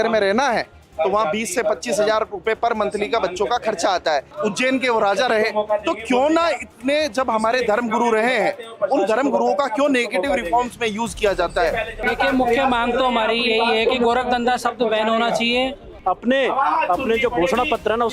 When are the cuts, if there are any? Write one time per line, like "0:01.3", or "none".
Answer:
0:04.3
0:12.0
0:15.9